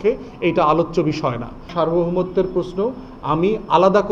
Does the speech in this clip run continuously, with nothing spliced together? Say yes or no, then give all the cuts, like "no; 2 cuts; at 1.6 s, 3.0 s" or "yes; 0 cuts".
no; 1 cut; at 1.7 s